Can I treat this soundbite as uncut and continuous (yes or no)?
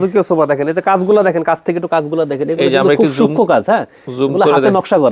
yes